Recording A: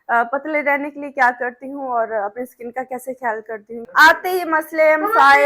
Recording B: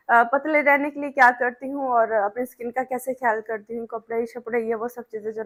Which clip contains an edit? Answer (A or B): A